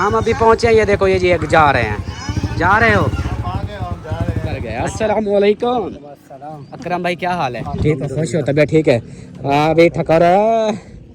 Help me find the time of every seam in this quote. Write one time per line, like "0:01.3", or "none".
0:04.8